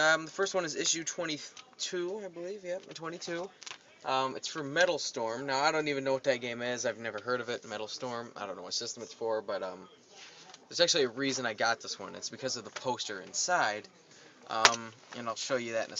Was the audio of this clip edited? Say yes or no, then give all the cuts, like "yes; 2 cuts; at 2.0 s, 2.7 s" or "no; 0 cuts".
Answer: yes; 1 cut; at 13.3 s